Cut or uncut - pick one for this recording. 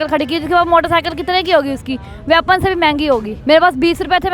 cut